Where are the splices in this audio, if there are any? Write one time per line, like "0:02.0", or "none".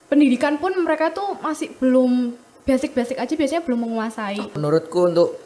0:04.5